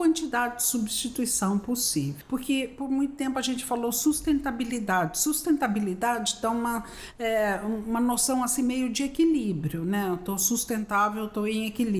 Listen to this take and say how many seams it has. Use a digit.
1